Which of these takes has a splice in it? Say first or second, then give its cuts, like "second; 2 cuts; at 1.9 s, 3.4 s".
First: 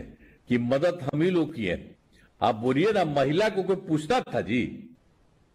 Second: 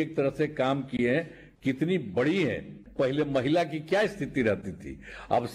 second; 1 cut; at 2.8 s